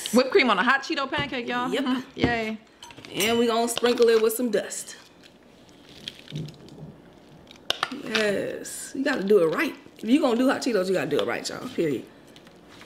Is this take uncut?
yes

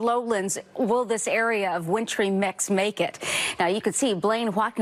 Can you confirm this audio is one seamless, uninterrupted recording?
yes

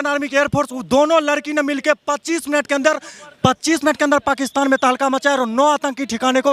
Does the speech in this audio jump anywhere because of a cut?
no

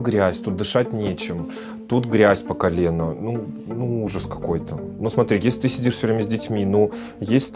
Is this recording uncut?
yes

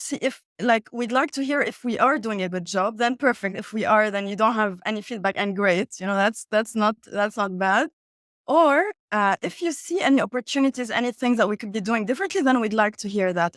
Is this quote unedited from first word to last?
yes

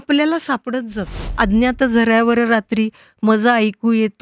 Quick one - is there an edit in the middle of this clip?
yes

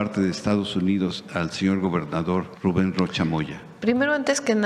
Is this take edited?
yes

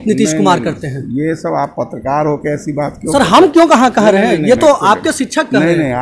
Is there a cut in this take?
no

